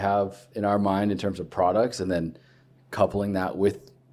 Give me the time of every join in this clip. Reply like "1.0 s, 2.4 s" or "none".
none